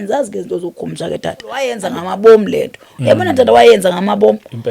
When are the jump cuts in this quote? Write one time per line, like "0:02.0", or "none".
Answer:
0:01.8